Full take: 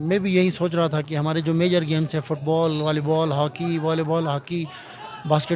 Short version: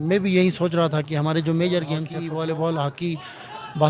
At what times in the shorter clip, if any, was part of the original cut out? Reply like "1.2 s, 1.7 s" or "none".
2.1 s